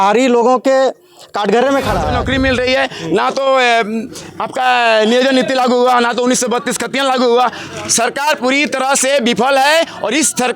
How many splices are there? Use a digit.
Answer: 1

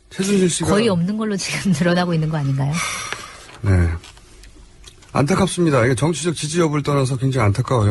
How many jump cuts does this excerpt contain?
0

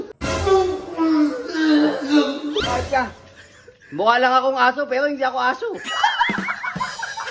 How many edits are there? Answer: 1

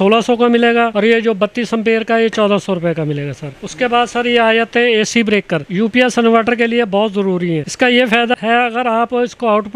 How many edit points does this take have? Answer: 0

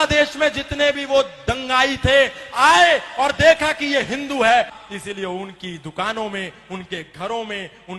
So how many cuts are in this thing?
1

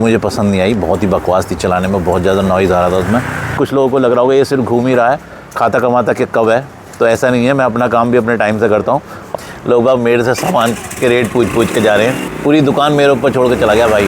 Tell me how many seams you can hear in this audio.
3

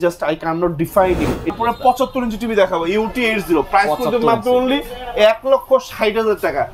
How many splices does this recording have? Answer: 1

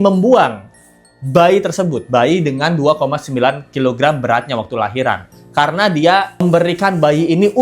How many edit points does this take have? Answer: 0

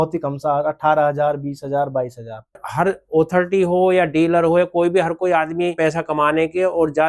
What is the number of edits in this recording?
2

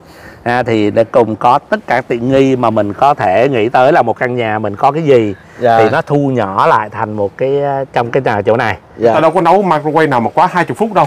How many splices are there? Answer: 1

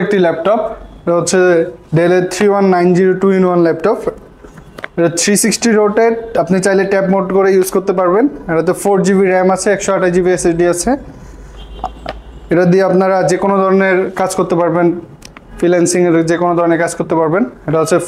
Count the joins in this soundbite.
0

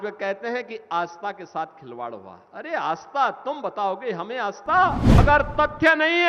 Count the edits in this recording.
1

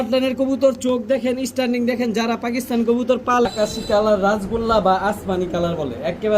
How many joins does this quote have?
1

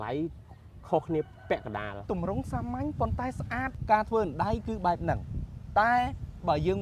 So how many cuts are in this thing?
1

